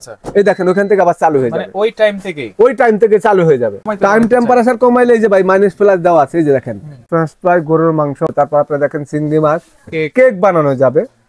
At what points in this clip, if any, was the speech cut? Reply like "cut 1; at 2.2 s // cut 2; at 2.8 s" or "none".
cut 1; at 3.8 s // cut 2; at 7.0 s // cut 3; at 8.3 s